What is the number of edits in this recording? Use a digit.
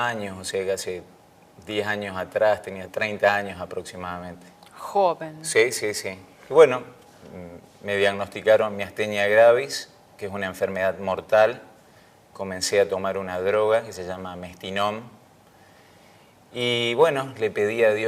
1